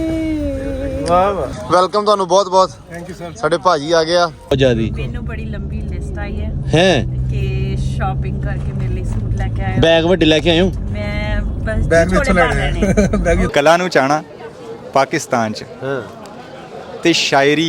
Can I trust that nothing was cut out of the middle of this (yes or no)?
no